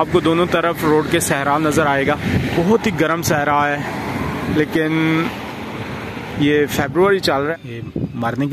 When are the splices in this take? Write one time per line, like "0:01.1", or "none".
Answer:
0:02.5
0:07.5